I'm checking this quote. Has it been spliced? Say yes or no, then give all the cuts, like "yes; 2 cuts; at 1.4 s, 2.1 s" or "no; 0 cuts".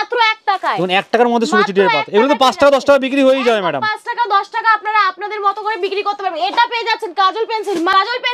no; 0 cuts